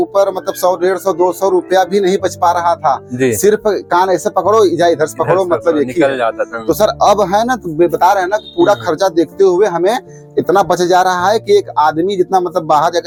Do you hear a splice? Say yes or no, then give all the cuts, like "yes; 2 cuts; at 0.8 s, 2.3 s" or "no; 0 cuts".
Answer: no; 0 cuts